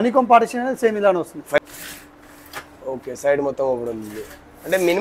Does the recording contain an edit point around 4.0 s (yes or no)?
no